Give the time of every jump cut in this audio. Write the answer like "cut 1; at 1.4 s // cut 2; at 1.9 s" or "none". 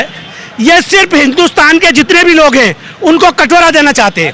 none

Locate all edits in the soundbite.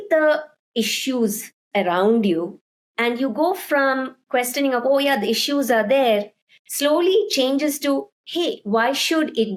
none

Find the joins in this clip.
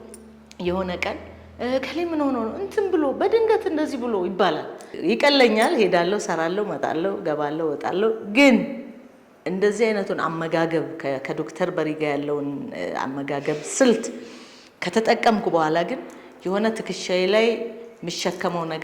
cut 1; at 4.9 s

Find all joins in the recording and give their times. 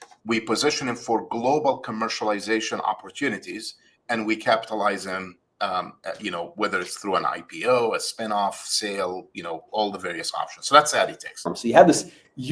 cut 1; at 11.6 s

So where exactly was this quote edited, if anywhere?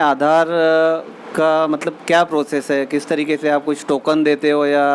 none

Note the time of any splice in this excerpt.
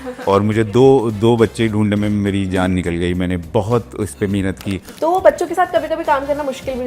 cut 1; at 4.9 s

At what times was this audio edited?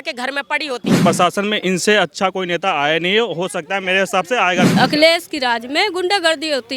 cut 1; at 0.9 s // cut 2; at 4.7 s

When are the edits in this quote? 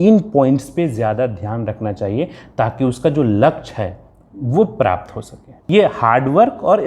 cut 1; at 5.5 s

